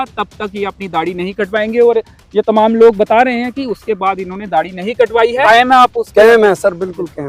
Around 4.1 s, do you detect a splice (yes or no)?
no